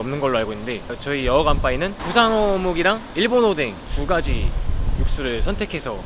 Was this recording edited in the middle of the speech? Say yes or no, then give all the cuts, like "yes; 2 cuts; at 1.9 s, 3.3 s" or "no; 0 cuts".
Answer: yes; 3 cuts; at 1.0 s, 2.0 s, 3.9 s